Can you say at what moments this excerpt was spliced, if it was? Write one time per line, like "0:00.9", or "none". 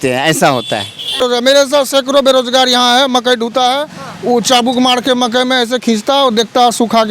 0:01.2